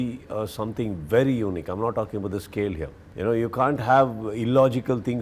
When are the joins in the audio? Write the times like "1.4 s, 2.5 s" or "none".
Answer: 3.0 s